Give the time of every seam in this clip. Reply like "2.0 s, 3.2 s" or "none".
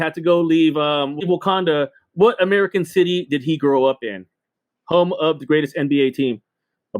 1.1 s